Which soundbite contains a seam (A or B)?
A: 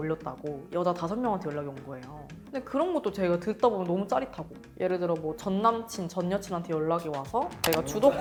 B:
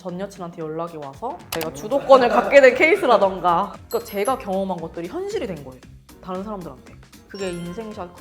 B